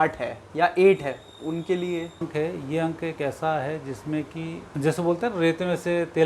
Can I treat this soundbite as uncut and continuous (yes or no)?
no